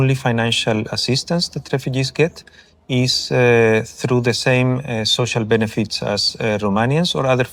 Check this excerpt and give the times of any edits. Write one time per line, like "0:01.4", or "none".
none